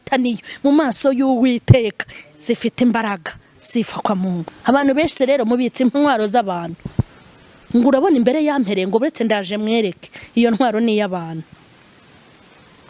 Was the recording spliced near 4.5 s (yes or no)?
yes